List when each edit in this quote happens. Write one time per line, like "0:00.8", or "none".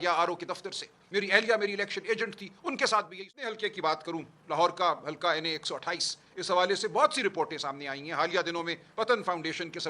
0:03.6